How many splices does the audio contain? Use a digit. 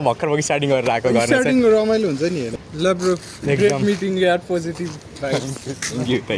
1